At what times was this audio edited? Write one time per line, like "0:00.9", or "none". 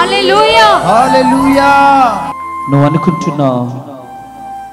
0:02.3